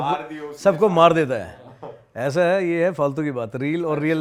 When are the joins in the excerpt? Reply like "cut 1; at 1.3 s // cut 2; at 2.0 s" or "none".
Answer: none

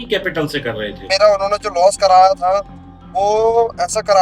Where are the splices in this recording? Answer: cut 1; at 1.0 s

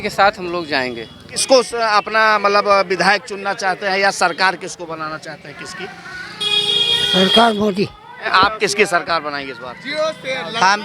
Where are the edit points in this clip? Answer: cut 1; at 1.3 s // cut 2; at 8.3 s

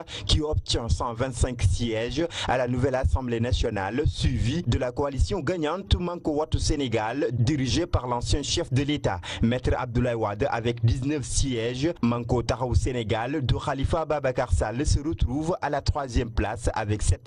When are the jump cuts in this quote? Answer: cut 1; at 12.0 s

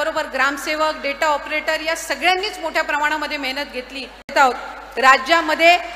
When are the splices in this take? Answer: cut 1; at 4.3 s

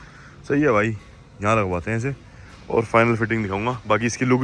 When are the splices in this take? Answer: none

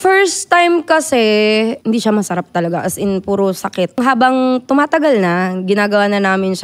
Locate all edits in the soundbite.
cut 1; at 1.8 s // cut 2; at 4.0 s

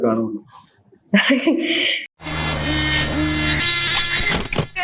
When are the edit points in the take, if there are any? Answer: cut 1; at 3.6 s

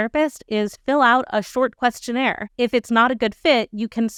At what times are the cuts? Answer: none

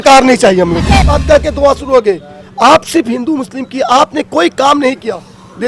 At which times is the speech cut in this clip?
cut 1; at 1.1 s

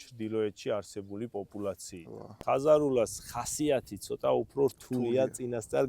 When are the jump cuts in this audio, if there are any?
cut 1; at 2.3 s

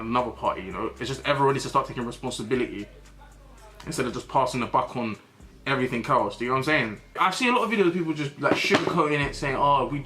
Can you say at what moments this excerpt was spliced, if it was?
cut 1; at 7.1 s

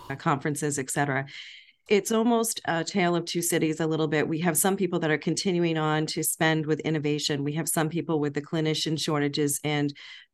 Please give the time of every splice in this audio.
none

